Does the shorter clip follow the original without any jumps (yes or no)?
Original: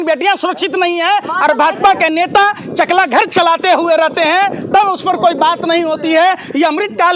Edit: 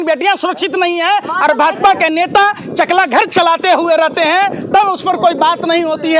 yes